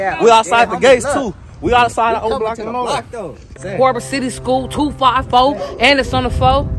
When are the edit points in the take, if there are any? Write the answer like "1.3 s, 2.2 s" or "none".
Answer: 3.5 s